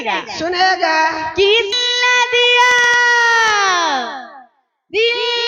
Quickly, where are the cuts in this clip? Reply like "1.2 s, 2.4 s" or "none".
1.7 s